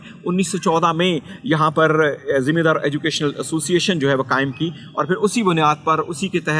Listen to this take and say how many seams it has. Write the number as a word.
zero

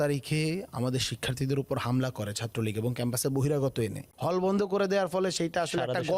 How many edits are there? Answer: one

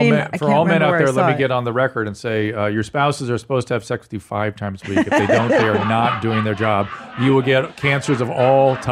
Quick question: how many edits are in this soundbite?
zero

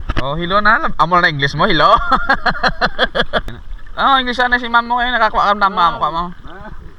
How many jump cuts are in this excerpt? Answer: one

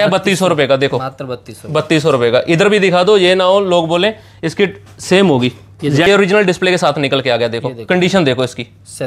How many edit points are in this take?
one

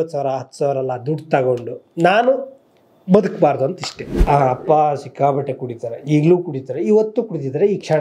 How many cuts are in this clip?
one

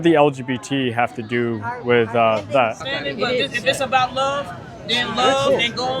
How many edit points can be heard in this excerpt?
one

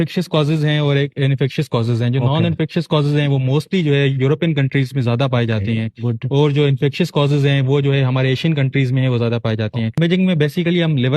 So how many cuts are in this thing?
one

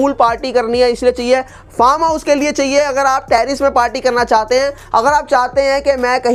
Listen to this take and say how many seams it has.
zero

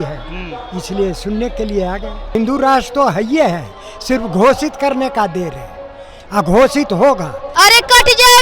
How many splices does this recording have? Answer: two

